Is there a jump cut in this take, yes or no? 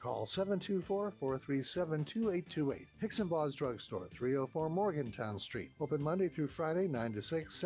yes